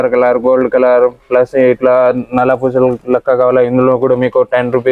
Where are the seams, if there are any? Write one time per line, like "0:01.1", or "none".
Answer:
none